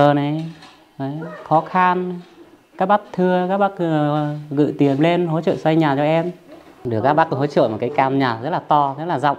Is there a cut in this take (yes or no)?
yes